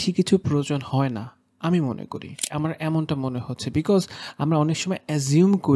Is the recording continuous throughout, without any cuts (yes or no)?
no